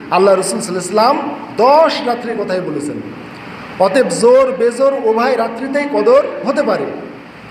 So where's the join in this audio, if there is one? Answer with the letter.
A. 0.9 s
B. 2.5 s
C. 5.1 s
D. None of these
D